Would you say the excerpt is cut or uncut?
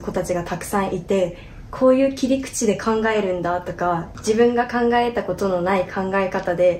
uncut